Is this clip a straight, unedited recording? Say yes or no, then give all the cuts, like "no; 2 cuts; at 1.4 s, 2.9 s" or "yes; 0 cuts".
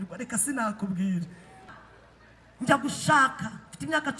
no; 1 cut; at 1.6 s